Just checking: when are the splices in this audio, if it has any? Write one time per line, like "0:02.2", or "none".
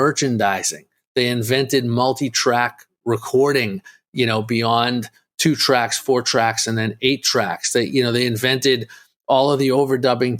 none